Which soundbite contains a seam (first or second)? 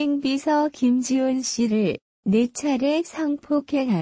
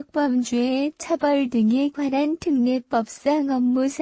first